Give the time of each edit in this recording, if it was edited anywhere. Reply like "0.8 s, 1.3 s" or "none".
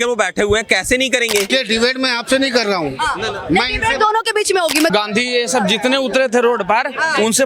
1.5 s, 4.9 s